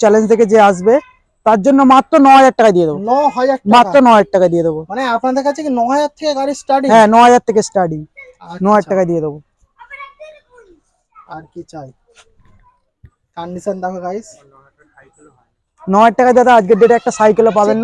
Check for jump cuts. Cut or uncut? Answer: uncut